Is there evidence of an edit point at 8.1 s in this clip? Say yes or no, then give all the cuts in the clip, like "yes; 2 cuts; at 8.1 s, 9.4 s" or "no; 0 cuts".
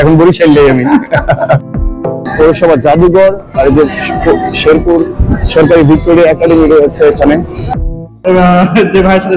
yes; 2 cuts; at 2.0 s, 8.1 s